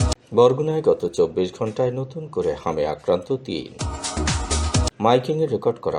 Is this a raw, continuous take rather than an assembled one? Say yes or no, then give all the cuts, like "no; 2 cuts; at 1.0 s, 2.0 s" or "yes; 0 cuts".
yes; 0 cuts